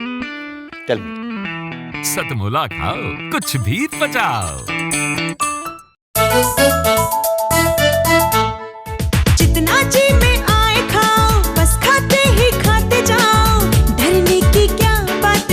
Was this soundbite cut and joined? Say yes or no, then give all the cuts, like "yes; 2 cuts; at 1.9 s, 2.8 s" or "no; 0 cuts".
yes; 1 cut; at 6.0 s